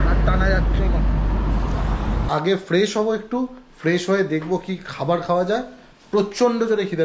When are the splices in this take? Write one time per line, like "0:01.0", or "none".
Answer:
0:02.3